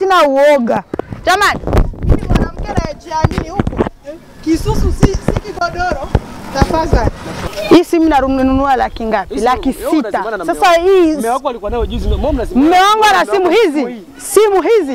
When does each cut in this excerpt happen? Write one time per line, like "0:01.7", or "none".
0:07.3